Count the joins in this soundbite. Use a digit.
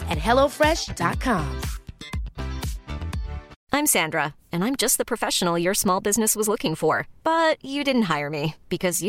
1